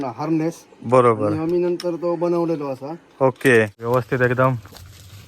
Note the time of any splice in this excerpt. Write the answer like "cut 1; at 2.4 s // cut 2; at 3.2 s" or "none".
cut 1; at 3.8 s